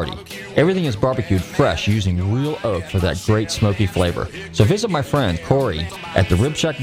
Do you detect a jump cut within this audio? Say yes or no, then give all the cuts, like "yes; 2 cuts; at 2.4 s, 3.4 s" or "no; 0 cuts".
yes; 1 cut; at 5.6 s